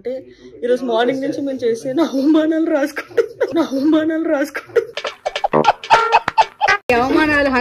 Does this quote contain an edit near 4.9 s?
yes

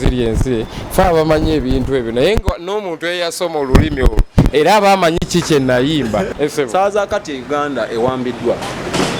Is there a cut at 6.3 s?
yes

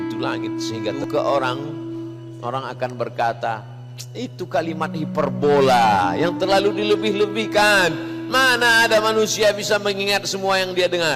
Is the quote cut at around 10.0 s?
no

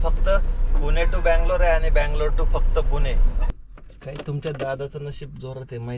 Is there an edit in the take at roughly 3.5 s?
yes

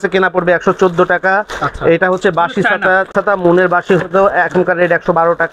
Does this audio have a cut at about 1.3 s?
no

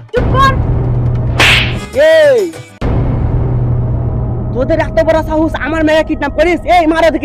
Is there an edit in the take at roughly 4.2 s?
no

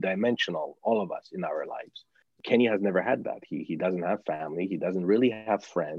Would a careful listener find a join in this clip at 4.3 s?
no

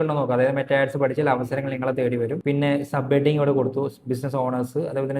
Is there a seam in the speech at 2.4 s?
yes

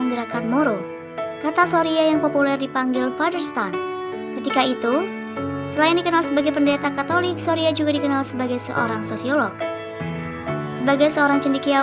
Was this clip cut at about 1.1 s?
no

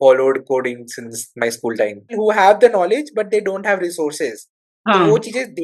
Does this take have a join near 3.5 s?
no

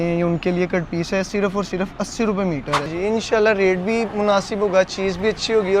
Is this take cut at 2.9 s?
yes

